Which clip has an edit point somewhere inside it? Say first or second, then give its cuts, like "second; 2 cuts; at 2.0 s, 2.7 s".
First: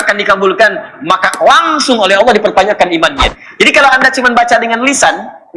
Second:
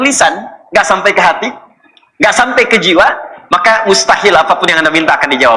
first; 1 cut; at 3.2 s